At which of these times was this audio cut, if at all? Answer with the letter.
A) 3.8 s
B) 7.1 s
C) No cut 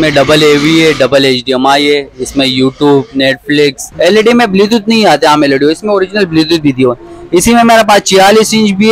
A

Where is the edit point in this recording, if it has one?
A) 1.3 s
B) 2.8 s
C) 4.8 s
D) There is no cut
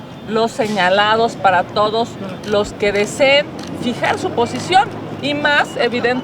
A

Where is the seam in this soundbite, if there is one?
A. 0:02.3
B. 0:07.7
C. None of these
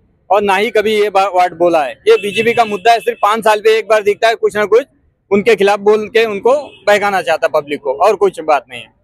C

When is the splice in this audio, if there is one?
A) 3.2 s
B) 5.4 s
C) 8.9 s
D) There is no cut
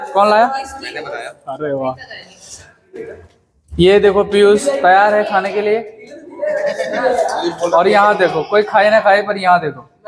D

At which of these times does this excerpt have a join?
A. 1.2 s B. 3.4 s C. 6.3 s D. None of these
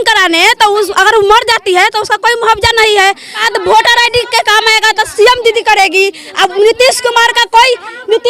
B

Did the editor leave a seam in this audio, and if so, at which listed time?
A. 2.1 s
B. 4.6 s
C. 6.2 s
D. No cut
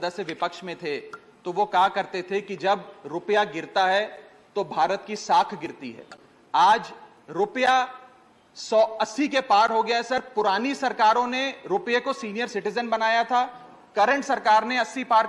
D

